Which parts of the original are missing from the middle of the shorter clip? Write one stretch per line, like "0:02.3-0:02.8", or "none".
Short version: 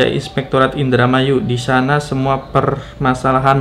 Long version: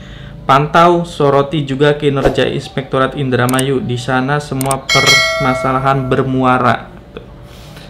none